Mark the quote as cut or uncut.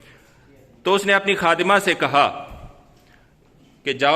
uncut